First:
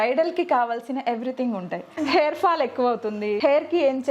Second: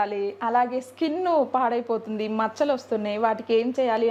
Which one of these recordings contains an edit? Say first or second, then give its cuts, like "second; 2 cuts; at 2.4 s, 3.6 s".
first; 2 cuts; at 1.9 s, 3.4 s